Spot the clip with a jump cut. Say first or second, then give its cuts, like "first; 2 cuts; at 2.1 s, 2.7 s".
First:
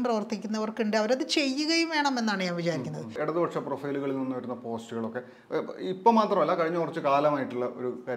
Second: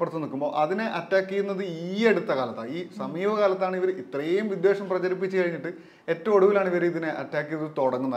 first; 1 cut; at 3.2 s